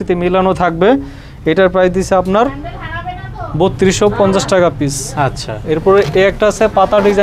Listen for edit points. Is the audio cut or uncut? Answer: uncut